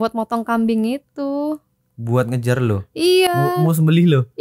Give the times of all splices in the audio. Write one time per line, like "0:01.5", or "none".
none

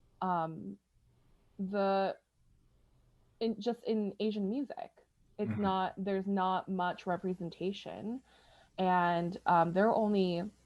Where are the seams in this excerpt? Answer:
none

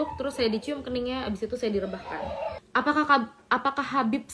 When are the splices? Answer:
0:02.6

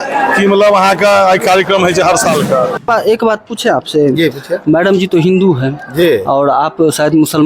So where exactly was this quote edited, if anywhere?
0:02.9

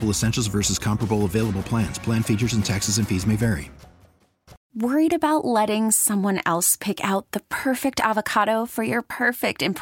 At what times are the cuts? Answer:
0:04.6

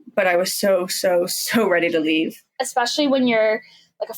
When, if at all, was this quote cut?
0:02.5

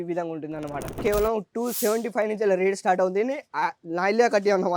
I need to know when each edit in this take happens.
0:01.0

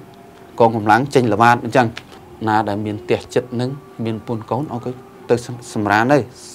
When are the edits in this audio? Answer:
0:02.3

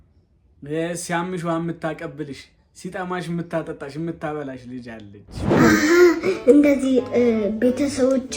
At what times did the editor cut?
0:05.5

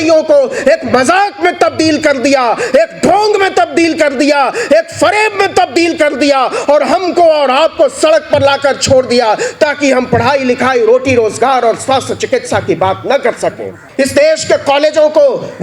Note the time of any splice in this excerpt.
0:13.8

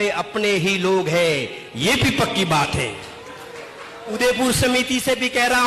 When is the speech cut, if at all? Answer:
0:04.1

